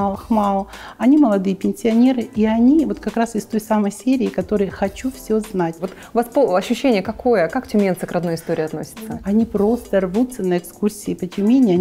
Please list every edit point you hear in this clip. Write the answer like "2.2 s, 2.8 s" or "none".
5.9 s, 8.8 s